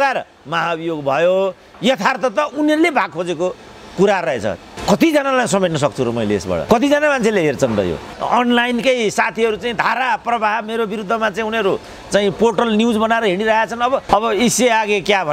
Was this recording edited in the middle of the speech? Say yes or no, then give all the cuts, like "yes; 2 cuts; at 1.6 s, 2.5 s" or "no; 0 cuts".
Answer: yes; 3 cuts; at 4.7 s, 8.1 s, 14.0 s